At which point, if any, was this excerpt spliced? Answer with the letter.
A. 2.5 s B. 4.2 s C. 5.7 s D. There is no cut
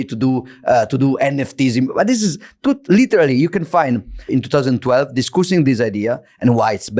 B